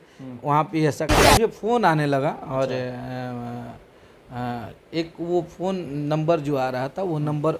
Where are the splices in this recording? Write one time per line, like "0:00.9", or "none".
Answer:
0:01.1